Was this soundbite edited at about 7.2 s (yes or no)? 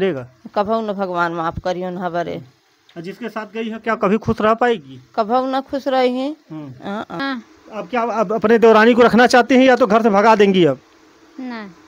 yes